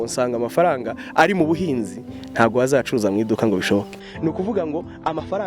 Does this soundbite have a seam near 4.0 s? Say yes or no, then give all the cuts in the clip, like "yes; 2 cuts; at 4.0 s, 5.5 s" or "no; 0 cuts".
yes; 1 cut; at 4.0 s